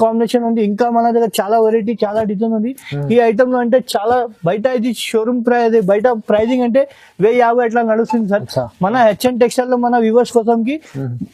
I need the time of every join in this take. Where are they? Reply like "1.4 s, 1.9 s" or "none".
none